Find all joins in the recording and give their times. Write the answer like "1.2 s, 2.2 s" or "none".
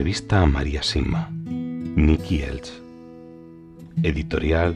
none